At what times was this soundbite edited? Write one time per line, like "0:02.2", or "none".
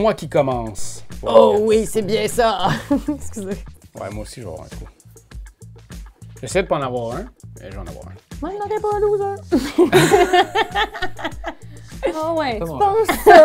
0:01.1